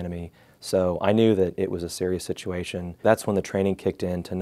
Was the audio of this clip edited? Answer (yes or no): yes